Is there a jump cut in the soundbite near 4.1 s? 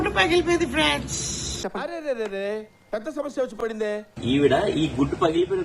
yes; 1 cut; at 4.1 s

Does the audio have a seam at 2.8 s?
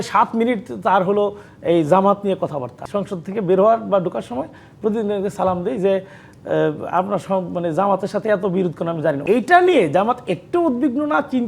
yes; 2 cuts; at 2.8 s, 9.2 s

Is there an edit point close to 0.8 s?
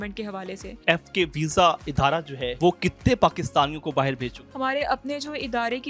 yes; 3 cuts; at 0.8 s, 2.4 s, 4.4 s

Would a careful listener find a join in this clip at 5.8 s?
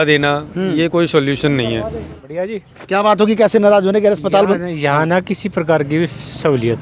no; 1 cut; at 2.1 s

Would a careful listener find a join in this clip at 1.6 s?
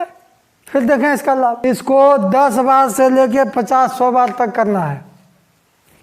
yes; 1 cut; at 1.6 s

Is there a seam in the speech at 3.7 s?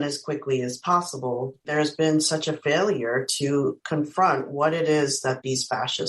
no; 1 cut; at 1.5 s

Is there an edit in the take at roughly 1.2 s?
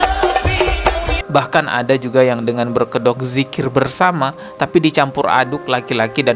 yes; 1 cut; at 1.2 s

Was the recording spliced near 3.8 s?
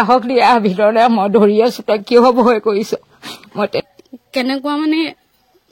yes; 1 cut; at 3.8 s

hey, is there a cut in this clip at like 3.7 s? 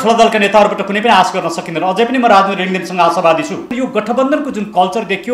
yes; 1 cut; at 3.7 s

